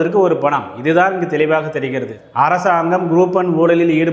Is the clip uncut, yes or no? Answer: no